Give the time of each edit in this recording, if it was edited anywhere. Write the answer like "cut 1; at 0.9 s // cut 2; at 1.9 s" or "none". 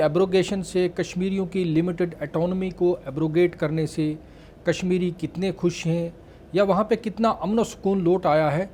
none